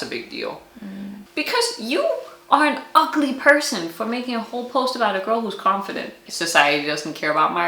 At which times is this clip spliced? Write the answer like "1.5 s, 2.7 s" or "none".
1.1 s, 6.2 s